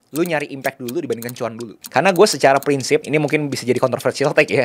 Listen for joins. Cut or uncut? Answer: cut